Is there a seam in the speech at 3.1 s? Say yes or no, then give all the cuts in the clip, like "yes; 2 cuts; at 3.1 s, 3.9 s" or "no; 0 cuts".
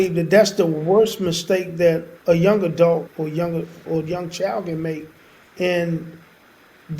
yes; 2 cuts; at 2.1 s, 3.1 s